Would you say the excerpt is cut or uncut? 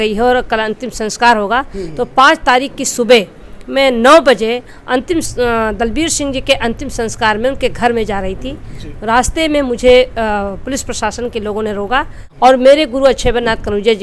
cut